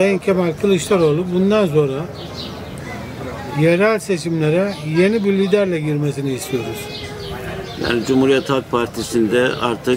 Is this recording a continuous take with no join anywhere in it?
yes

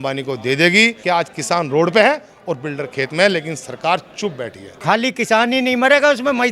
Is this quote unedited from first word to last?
no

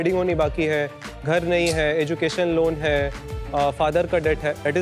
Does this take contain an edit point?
no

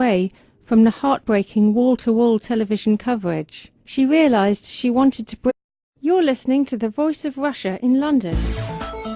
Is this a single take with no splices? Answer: yes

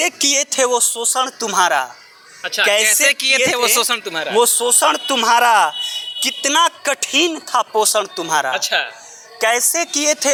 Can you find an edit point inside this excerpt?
no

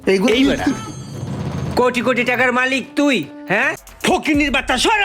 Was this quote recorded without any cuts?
no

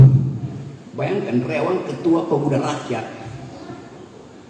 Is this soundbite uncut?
yes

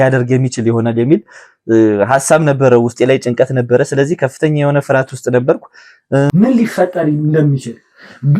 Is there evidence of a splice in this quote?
yes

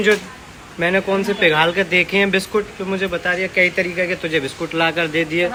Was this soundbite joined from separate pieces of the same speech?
no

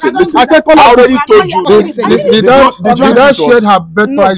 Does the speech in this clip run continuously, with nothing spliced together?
no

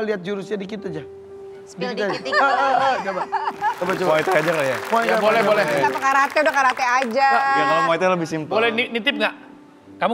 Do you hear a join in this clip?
no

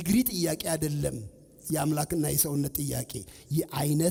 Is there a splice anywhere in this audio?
no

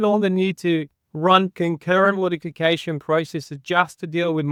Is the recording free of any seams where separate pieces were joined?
yes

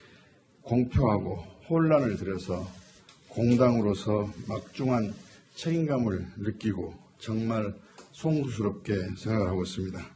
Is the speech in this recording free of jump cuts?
yes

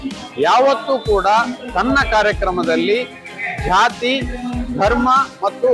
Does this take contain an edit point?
no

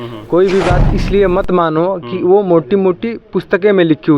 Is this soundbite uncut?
yes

